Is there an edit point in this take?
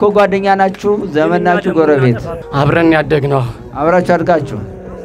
yes; 1 cut; at 2.4 s

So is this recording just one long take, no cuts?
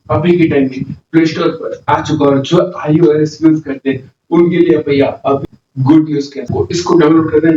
no; 1 cut; at 5.4 s

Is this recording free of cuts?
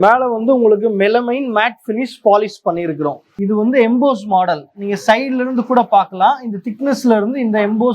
no; 1 cut; at 3.3 s

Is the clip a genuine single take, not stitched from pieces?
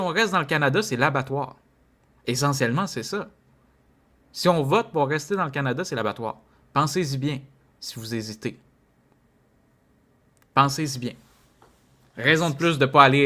yes; 0 cuts

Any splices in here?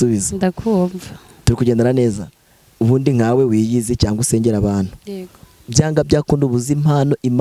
no; 0 cuts

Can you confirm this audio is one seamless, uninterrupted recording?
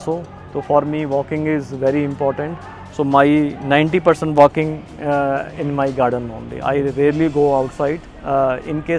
yes; 0 cuts

